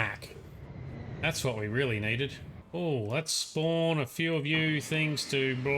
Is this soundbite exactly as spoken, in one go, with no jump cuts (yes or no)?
no